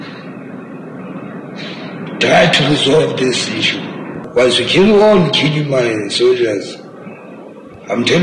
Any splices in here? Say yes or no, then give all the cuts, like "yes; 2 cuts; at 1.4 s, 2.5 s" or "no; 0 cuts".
yes; 1 cut; at 4.2 s